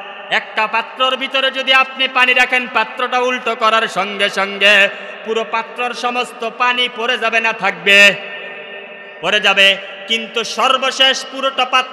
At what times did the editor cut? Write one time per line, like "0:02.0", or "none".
none